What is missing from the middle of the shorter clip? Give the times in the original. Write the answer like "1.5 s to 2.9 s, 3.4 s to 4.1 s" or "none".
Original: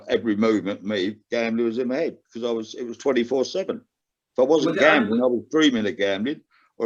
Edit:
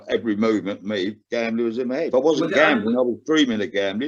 2.1 s to 4.3 s